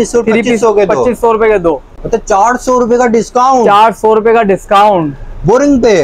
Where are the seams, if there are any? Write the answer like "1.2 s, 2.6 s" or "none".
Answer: 1.9 s